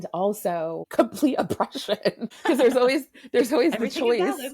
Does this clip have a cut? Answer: yes; 2 cuts; at 0.9 s, 2.3 s

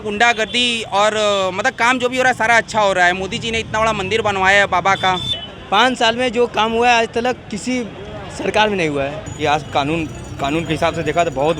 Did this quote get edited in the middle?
yes; 2 cuts; at 5.5 s, 9.3 s

